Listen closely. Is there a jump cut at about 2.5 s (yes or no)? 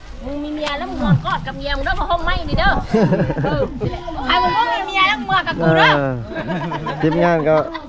no